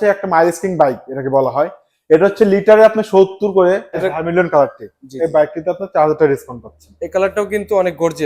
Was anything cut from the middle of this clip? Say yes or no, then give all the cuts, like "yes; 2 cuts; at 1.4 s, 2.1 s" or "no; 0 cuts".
yes; 1 cut; at 4.0 s